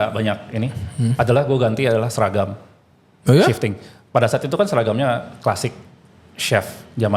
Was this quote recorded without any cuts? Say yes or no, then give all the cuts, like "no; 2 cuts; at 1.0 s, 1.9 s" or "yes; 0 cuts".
yes; 0 cuts